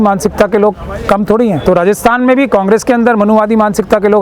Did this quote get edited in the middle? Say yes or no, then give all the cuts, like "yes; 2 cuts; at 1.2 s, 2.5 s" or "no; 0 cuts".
yes; 1 cut; at 1.6 s